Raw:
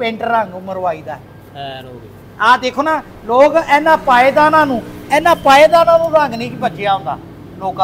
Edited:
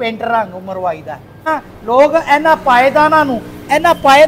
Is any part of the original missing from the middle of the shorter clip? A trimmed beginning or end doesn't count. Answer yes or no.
yes